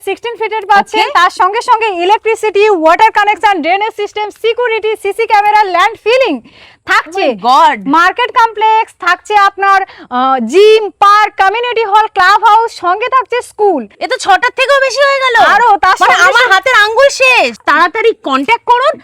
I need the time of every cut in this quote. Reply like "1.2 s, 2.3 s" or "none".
17.6 s